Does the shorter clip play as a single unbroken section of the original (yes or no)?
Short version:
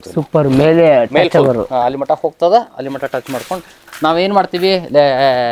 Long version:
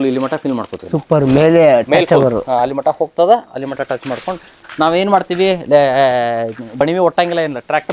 yes